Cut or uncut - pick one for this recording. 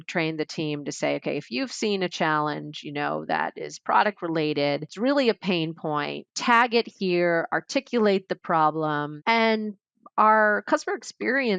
cut